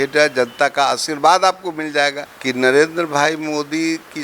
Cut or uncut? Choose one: cut